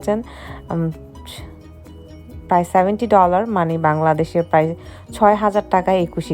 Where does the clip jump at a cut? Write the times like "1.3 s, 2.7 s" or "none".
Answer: 0.9 s, 2.5 s